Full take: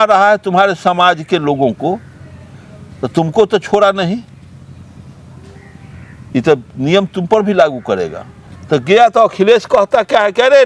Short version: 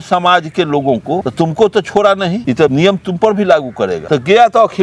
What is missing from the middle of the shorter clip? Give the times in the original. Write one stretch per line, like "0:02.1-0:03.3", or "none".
0:02.0-0:03.0
0:04.4-0:06.7
0:08.1-0:08.6